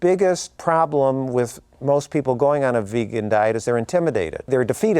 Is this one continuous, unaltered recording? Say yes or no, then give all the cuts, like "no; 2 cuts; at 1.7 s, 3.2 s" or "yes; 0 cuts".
yes; 0 cuts